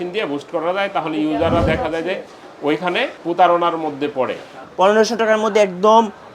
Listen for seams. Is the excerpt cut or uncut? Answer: cut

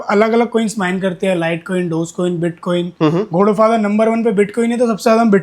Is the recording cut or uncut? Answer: uncut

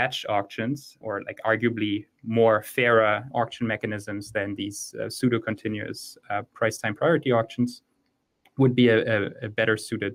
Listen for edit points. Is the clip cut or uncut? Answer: uncut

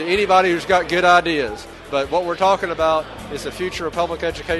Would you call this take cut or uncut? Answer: cut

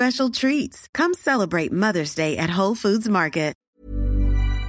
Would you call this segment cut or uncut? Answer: cut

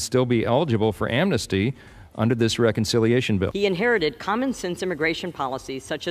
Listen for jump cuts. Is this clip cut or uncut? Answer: cut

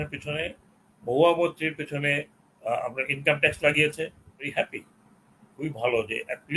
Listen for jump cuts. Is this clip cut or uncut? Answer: cut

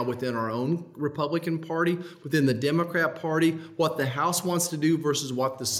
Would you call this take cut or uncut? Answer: uncut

